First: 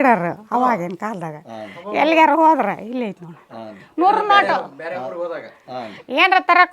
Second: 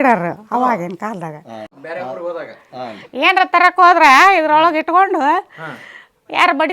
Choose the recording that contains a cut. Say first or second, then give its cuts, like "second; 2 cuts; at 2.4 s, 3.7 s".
second; 1 cut; at 1.8 s